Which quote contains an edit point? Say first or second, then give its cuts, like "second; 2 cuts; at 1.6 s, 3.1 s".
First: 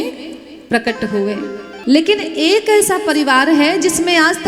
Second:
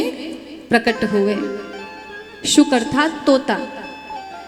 first; 1 cut; at 1.7 s